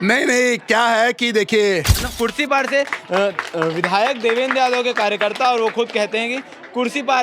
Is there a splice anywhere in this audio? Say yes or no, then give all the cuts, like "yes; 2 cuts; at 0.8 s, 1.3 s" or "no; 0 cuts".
yes; 1 cut; at 2.0 s